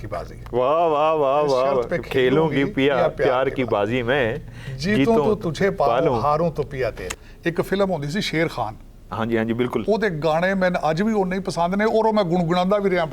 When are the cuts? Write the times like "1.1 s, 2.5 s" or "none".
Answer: 7.0 s